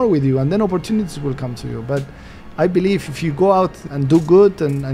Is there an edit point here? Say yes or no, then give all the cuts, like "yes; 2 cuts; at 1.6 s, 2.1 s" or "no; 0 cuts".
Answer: yes; 1 cut; at 3.9 s